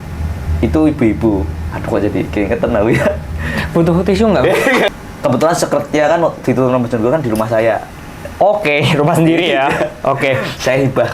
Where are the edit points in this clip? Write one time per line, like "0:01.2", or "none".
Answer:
0:04.9